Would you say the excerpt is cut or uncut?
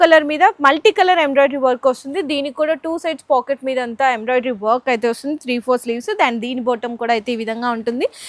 uncut